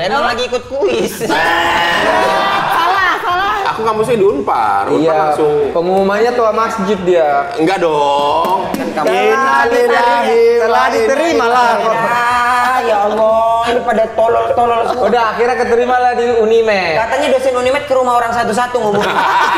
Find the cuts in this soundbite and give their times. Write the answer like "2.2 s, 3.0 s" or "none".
3.6 s